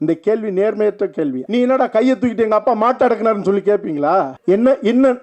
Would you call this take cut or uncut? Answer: cut